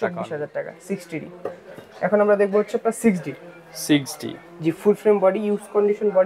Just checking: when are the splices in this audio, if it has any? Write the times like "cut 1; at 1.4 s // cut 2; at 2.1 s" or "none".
none